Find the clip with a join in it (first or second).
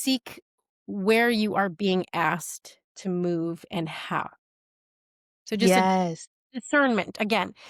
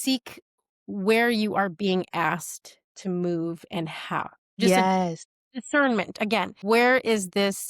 second